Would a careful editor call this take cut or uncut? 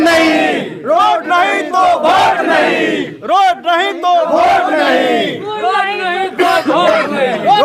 uncut